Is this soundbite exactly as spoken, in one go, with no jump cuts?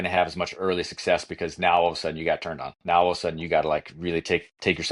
yes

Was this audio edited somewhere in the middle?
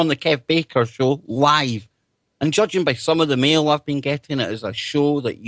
no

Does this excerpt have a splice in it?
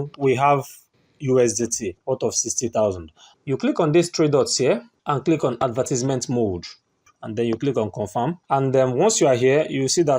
yes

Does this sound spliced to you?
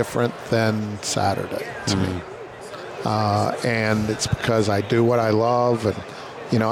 no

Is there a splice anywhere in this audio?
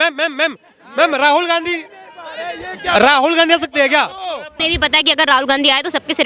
yes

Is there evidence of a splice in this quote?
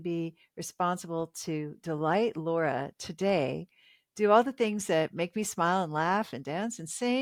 no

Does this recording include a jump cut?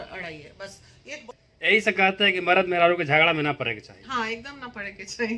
yes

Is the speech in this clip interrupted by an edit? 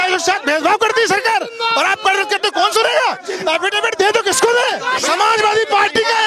yes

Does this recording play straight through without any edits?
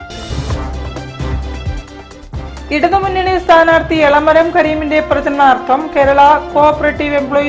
no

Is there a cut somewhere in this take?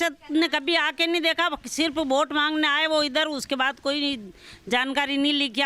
no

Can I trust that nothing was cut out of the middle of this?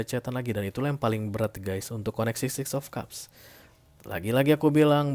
yes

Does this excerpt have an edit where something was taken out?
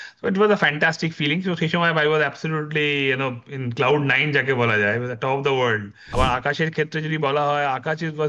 yes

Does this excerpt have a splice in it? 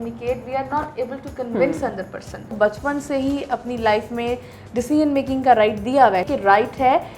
yes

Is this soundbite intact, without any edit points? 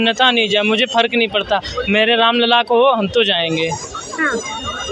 yes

